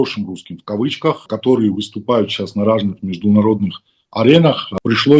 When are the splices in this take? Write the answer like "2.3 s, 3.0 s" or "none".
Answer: 1.3 s